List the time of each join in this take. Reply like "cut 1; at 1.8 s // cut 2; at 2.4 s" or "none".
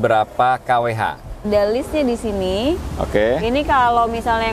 cut 1; at 1.5 s